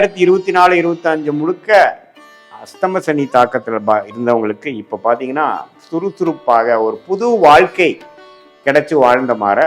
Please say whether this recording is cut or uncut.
uncut